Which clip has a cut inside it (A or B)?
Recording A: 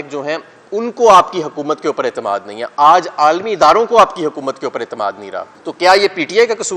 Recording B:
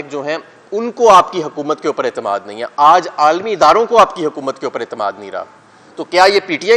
A